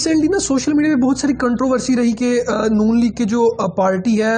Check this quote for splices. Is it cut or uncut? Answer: uncut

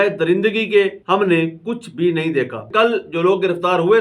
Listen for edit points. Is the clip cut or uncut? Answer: cut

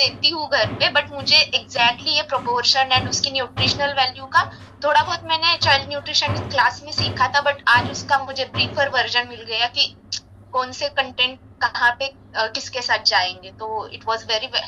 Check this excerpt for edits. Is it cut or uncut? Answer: uncut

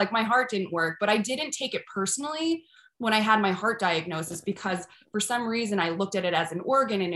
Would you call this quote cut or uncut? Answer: uncut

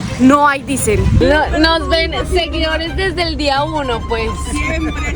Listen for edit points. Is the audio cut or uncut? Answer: cut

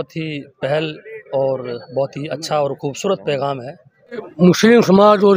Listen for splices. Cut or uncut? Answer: cut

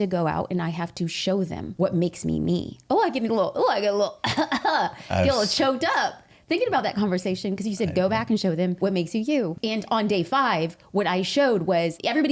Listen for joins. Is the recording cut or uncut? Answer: cut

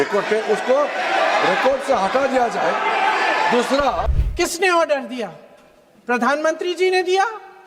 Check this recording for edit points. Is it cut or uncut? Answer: cut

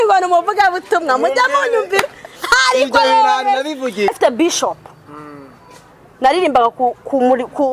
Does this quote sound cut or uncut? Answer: cut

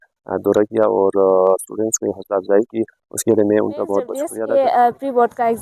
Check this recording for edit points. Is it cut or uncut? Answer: cut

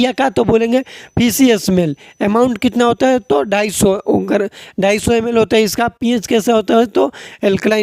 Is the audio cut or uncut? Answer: uncut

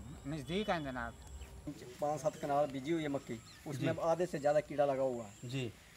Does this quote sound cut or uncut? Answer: cut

